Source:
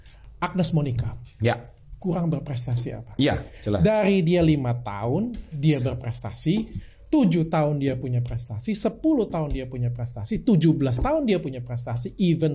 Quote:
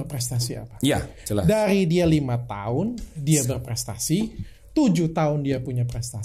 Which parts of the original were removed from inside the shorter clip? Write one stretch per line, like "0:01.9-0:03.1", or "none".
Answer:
none